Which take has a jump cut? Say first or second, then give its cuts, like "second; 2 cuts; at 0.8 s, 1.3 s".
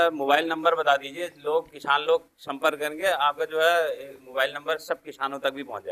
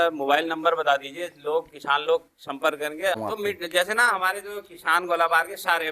second; 1 cut; at 3.2 s